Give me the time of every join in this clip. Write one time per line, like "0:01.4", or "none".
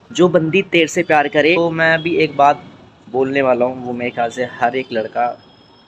0:01.6